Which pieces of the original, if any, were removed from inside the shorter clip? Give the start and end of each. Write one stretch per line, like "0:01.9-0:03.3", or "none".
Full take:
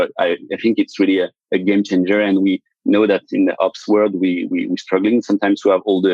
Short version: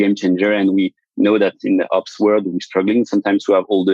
0:04.2-0:04.7